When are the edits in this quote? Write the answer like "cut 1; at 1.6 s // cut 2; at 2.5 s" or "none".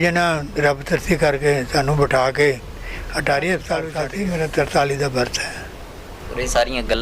cut 1; at 4.0 s